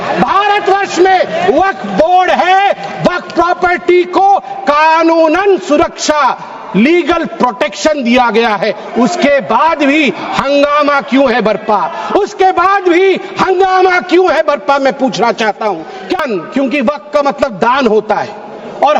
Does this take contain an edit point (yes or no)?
yes